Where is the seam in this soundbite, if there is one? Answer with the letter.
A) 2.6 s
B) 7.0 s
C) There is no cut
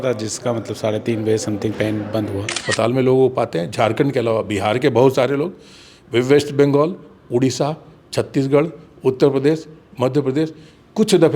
A